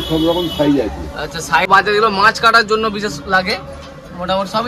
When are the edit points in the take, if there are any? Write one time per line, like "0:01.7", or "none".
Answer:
0:01.7